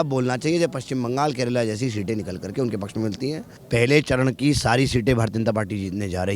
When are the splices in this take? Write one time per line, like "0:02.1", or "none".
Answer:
0:03.5